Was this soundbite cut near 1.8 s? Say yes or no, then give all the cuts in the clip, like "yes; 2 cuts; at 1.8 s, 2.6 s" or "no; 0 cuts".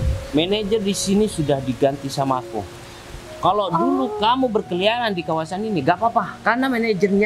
no; 0 cuts